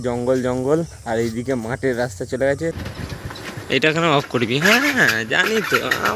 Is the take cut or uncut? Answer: cut